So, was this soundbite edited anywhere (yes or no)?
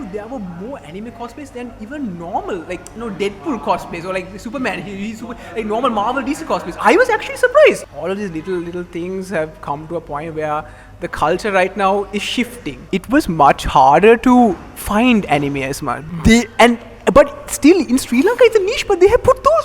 yes